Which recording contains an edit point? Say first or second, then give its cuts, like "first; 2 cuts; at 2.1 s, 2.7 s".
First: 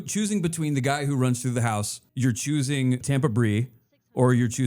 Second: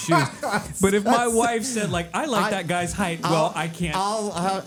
first; 2 cuts; at 2.0 s, 3.0 s